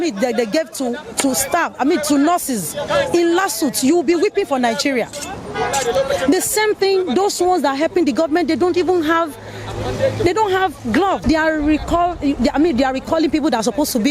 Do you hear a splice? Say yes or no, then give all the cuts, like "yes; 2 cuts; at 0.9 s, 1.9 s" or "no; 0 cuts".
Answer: yes; 1 cut; at 11.2 s